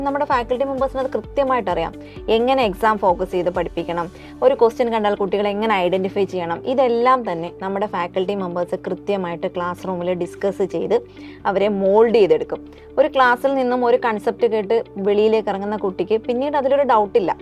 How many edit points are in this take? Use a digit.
0